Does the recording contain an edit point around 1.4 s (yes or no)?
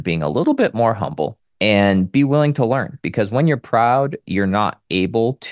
yes